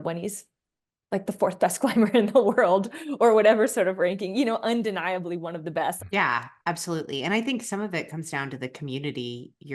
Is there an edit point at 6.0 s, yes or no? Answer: yes